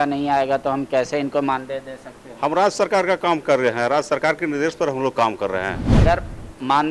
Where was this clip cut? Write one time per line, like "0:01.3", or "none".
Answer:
0:05.9